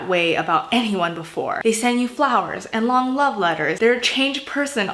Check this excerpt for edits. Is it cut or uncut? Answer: cut